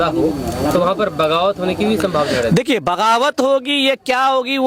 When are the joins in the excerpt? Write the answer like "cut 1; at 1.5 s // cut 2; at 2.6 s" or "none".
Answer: none